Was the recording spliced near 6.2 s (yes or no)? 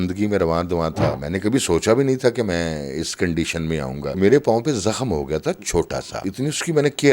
yes